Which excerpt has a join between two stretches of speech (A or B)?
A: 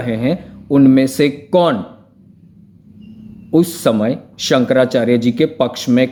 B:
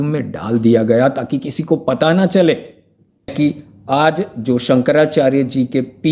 B